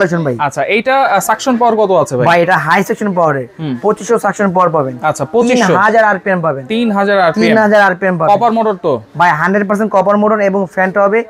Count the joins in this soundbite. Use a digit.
0